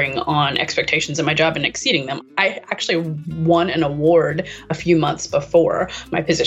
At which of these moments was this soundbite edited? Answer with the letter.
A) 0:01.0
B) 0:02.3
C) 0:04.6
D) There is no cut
B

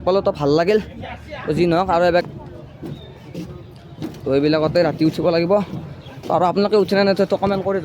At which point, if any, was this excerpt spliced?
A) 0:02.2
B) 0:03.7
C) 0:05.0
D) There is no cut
A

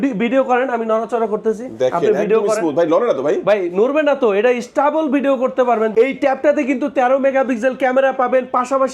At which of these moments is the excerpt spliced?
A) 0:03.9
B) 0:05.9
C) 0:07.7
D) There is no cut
B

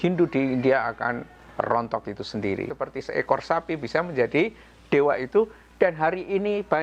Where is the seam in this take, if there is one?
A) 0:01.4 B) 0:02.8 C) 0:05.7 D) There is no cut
B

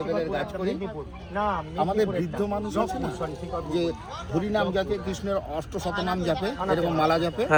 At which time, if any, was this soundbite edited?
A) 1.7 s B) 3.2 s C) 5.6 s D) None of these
D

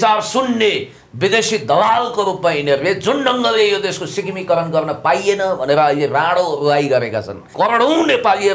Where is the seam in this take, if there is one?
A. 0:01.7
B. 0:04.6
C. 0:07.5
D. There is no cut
C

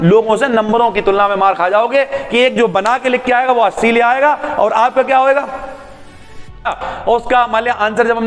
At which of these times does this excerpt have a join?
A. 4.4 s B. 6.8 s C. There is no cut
B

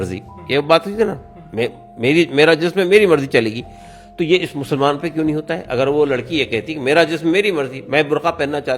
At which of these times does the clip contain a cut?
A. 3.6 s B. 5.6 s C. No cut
C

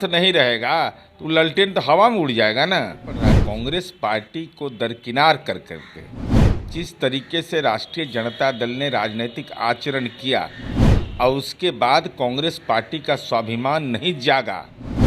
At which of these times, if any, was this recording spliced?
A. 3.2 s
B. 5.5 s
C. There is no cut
A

